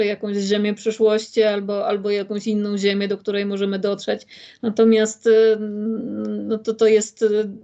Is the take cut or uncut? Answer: uncut